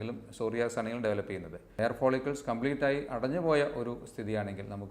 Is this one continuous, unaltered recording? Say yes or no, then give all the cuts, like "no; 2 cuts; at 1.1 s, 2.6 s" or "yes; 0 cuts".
no; 1 cut; at 1.6 s